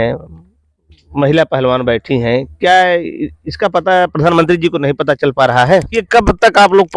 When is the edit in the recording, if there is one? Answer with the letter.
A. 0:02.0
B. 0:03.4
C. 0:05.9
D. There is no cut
C